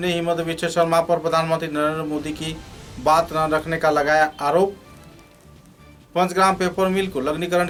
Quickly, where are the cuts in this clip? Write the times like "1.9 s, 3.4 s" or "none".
none